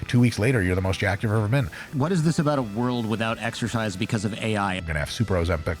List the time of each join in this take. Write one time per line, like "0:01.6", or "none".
0:01.8
0:04.8